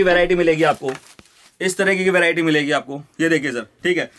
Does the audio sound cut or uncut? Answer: uncut